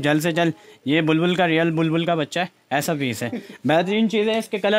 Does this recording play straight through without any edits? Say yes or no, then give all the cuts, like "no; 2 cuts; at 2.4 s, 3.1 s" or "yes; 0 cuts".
yes; 0 cuts